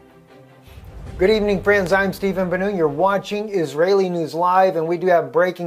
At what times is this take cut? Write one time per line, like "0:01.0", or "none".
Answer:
none